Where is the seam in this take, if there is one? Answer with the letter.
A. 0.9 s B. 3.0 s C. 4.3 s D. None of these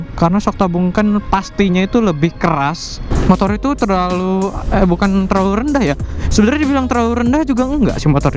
B